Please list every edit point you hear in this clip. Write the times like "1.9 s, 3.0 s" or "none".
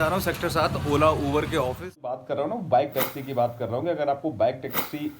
2.2 s